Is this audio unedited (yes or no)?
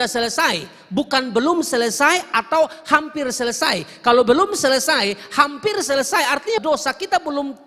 no